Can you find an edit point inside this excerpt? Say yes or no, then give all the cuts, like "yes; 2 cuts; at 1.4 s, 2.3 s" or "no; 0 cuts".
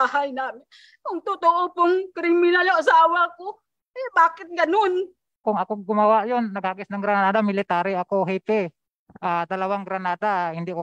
yes; 1 cut; at 5.4 s